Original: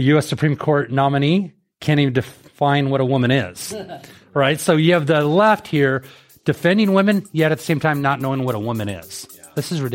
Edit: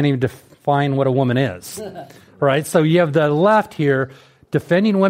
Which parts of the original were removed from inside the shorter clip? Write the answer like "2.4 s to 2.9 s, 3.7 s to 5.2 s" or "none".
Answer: none